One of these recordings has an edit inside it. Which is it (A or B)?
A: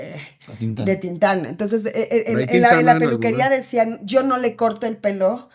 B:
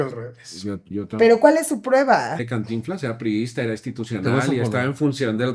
B